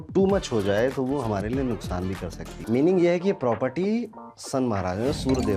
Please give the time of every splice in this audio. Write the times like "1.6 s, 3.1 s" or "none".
2.5 s